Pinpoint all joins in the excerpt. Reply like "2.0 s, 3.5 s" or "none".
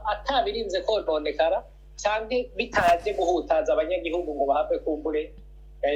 none